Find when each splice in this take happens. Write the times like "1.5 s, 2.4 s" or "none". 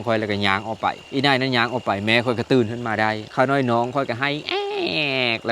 1.0 s, 3.2 s